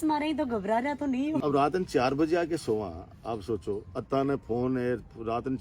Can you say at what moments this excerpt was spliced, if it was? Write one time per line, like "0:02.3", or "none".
0:01.4

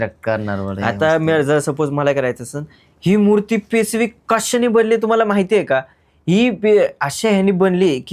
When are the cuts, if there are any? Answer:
none

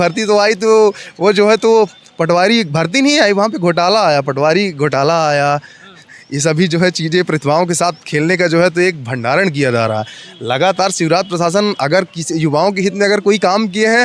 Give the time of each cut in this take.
none

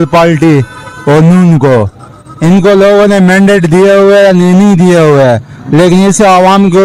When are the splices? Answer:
none

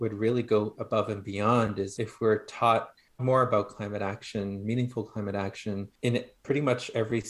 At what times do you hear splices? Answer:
0:01.9
0:03.2
0:05.9

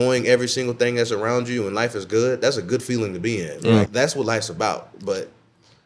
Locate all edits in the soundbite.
0:03.9

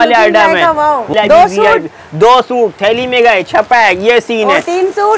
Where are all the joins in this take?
0:01.1

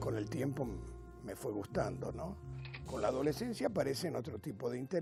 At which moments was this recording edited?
none

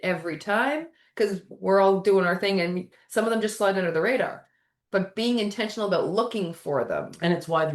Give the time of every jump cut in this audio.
0:01.5

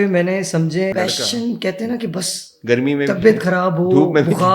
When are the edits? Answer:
0:00.9

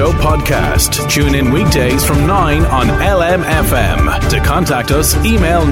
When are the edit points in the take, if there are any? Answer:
none

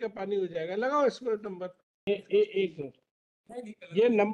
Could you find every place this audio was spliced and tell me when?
0:02.0

